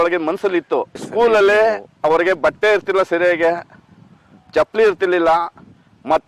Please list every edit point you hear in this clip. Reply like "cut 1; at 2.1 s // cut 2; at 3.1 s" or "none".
cut 1; at 1.0 s